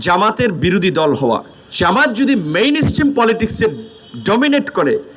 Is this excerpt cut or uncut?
cut